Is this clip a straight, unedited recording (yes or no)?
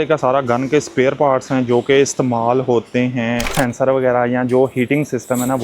no